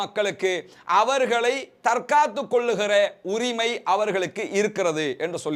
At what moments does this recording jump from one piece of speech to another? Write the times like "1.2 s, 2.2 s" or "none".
none